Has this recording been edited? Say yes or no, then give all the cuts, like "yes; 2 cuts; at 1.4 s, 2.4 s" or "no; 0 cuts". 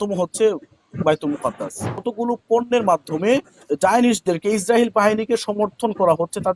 yes; 1 cut; at 2.0 s